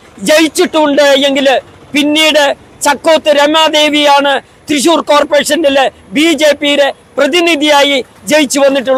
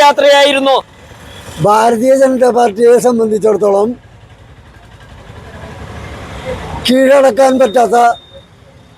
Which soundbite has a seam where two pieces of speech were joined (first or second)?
second